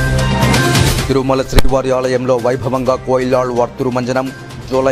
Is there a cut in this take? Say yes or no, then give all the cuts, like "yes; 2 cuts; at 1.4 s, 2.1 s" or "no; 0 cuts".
yes; 1 cut; at 1.0 s